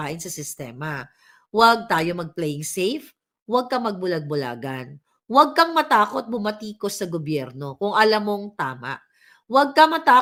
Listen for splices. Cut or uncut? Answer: uncut